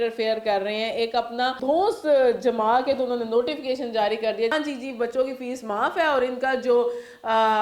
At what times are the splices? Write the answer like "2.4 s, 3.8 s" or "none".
1.6 s, 4.5 s